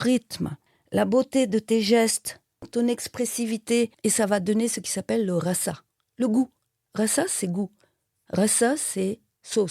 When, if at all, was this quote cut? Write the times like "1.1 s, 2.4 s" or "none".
2.7 s